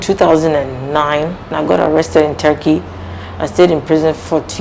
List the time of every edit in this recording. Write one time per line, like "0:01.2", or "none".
0:01.4